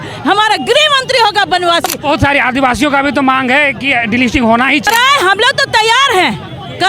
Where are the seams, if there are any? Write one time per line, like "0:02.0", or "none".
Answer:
0:01.9
0:04.9